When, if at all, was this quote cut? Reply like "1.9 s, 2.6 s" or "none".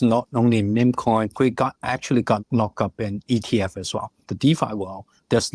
1.3 s, 2.4 s, 4.3 s